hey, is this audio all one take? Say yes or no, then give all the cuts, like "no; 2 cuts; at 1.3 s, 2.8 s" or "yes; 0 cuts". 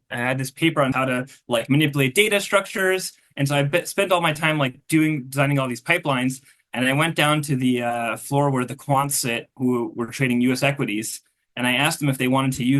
no; 2 cuts; at 1.0 s, 9.5 s